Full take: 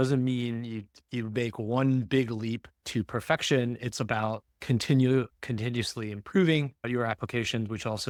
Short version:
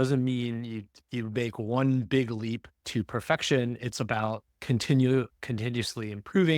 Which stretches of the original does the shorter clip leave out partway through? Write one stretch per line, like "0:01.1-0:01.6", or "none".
none